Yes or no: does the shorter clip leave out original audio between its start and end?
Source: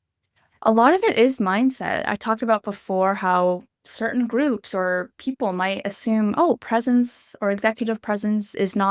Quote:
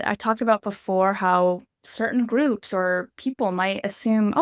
no